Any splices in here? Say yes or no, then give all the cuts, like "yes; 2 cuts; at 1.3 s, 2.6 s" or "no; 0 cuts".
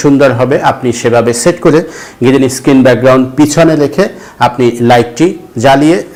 no; 0 cuts